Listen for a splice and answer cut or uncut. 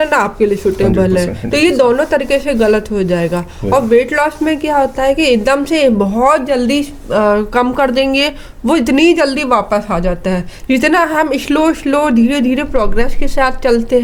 uncut